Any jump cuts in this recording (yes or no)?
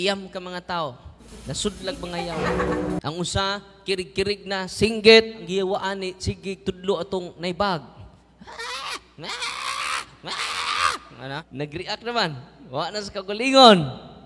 yes